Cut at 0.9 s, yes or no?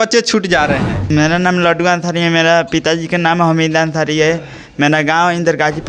yes